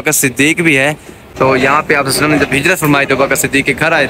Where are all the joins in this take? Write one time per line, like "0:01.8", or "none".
0:01.2